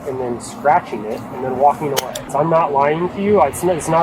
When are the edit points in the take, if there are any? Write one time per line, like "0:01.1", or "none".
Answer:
0:02.3